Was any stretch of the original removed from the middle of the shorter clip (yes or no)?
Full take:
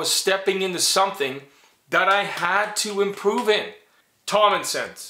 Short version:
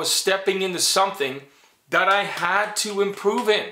no